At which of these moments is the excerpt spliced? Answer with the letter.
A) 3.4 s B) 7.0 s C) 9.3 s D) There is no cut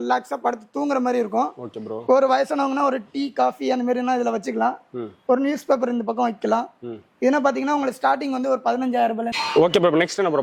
C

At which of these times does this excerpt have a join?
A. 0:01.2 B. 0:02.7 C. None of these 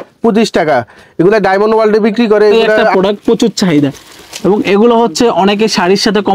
B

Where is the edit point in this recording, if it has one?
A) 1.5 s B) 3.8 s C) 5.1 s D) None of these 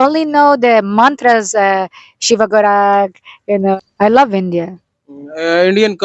B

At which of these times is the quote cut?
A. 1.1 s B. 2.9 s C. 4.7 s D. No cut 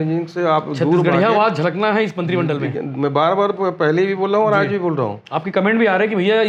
D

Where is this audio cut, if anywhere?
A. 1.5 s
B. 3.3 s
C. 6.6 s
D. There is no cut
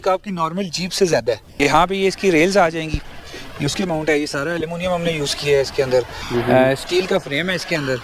A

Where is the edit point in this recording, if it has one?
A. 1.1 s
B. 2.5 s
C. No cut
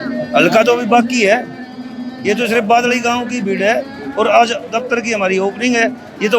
C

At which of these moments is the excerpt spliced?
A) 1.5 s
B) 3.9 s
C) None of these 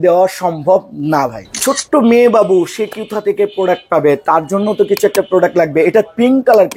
A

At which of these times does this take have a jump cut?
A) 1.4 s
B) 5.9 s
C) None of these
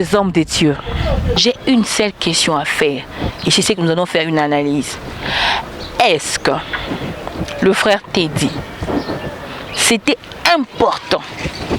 A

